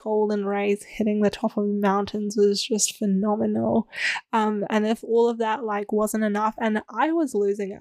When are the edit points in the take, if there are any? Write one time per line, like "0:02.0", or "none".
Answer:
none

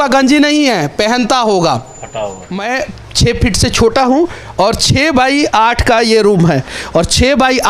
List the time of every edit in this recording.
0:02.6

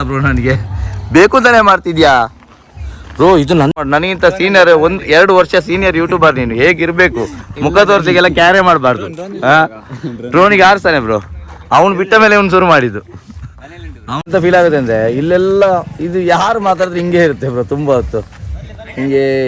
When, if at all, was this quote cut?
0:03.8
0:14.3

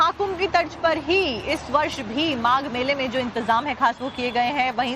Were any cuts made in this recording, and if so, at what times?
0:03.6

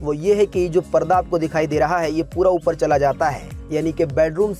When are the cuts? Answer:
none

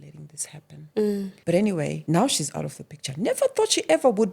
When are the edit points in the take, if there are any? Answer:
0:01.3
0:02.0

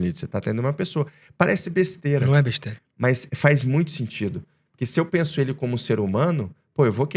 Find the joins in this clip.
none

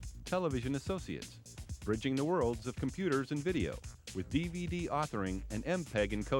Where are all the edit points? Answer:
none

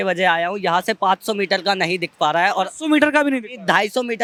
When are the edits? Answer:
none

